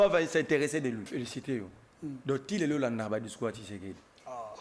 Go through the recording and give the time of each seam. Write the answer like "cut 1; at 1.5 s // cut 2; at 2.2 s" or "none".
cut 1; at 1.1 s